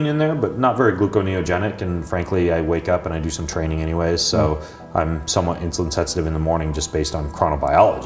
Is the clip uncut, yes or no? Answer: yes